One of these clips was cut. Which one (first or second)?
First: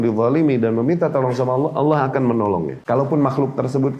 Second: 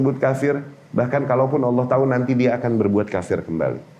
first